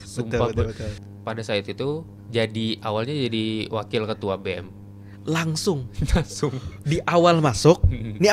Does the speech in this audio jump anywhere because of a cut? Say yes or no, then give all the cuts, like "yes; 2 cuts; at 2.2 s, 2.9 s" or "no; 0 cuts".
yes; 2 cuts; at 1.0 s, 2.1 s